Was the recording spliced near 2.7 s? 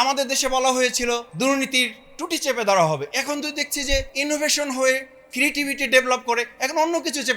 no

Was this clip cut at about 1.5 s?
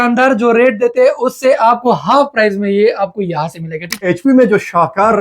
no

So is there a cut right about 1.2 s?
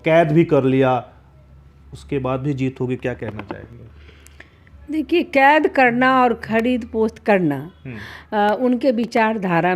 no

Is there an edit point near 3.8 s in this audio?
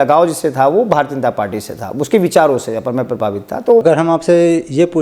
yes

